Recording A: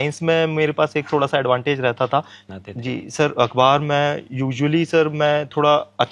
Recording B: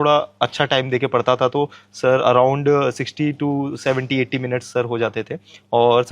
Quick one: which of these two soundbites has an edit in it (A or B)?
A